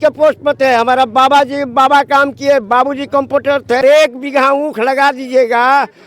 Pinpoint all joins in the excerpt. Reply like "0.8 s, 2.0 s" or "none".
3.8 s